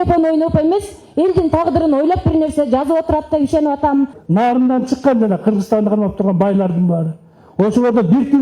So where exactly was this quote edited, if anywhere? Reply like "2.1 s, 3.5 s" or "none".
4.2 s